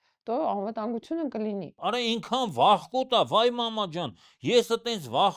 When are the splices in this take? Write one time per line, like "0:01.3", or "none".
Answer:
0:01.7